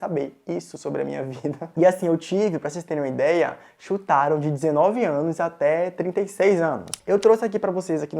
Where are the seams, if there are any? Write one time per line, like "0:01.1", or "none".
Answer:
0:01.7
0:06.9